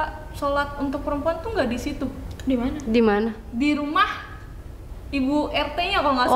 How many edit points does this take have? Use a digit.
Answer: 0